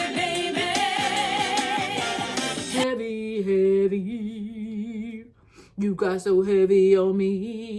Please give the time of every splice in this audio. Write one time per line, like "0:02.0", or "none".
0:02.7